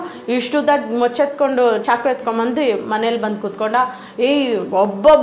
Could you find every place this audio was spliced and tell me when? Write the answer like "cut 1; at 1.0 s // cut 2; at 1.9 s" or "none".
none